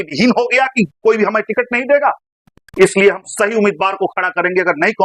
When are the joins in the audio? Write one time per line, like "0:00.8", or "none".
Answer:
none